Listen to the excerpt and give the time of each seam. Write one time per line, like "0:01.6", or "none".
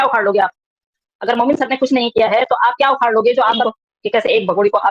0:03.6

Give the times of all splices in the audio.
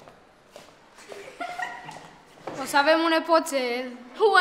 none

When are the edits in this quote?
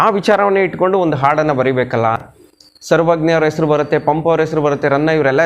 0:02.2

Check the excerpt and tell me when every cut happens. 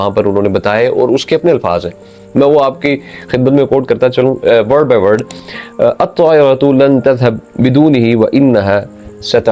none

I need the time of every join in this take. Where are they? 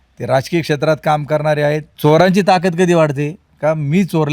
0:01.9

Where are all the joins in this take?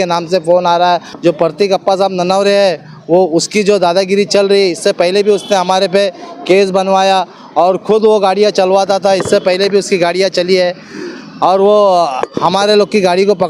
0:01.1

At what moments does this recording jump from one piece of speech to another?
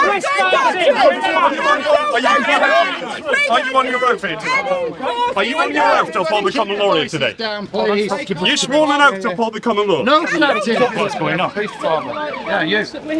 0:11.0

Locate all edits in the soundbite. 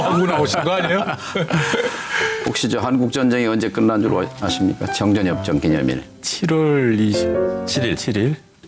none

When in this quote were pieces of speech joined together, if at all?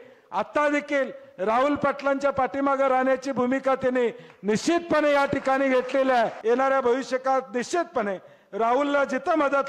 0:06.4

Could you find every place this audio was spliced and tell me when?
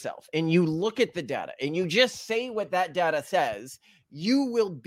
none

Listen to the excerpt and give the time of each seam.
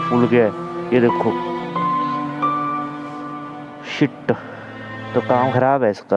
none

